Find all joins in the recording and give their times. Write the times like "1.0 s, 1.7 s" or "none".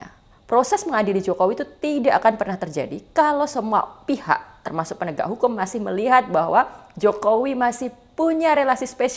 none